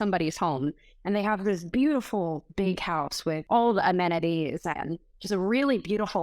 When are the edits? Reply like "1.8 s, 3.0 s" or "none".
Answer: 3.4 s